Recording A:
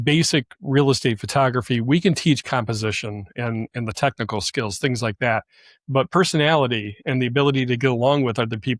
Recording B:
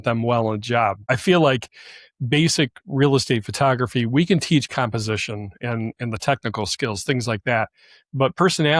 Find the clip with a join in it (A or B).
B